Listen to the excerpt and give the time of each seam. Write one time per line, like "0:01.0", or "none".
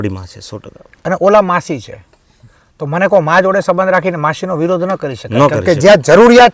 none